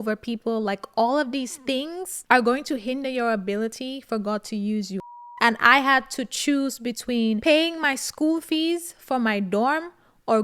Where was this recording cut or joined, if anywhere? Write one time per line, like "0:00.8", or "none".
0:05.1